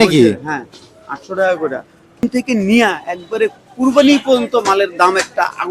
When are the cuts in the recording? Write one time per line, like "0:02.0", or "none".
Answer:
0:02.2